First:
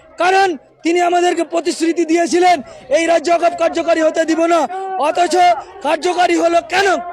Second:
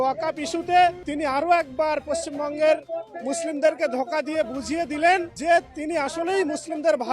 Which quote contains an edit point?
second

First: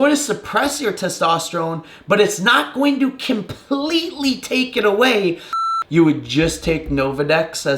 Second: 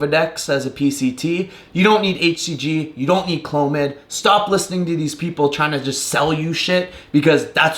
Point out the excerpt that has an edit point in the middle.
first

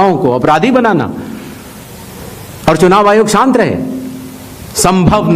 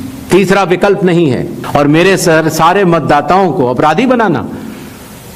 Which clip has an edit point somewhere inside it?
second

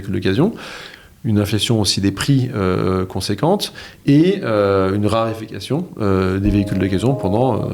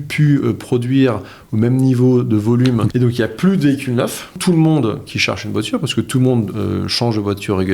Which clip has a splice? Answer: second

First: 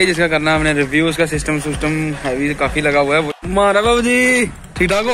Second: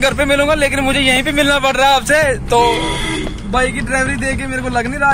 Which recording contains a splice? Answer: first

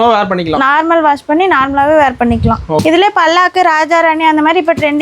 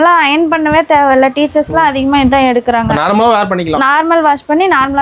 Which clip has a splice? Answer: first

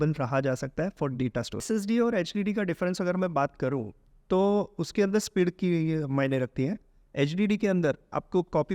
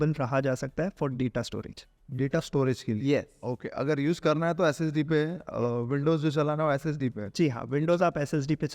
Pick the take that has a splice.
first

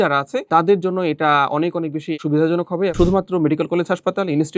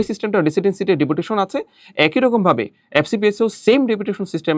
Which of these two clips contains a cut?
first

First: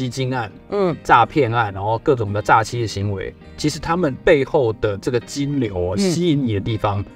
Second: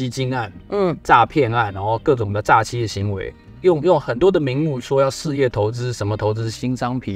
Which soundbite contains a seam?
first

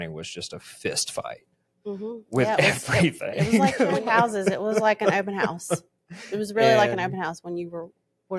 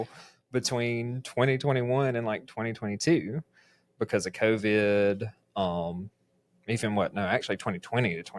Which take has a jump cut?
first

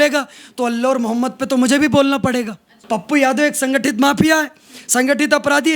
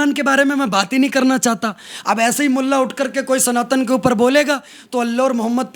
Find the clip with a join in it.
first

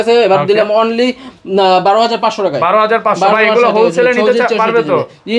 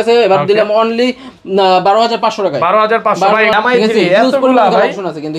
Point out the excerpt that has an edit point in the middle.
second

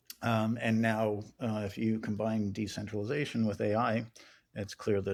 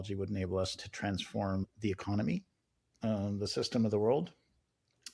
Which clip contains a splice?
second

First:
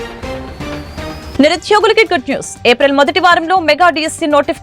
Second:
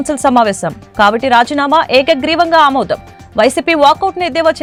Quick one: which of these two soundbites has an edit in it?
first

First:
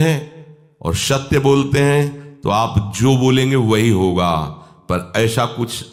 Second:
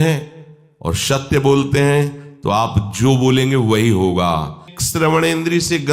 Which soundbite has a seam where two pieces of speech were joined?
second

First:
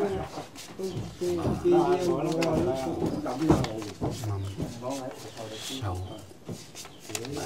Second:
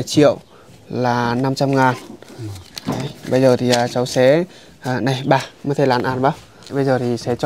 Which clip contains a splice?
second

